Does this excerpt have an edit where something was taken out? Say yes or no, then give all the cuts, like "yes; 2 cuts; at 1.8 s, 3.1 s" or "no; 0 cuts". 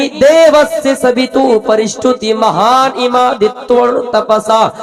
no; 0 cuts